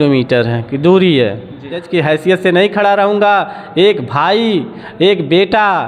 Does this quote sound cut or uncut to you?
cut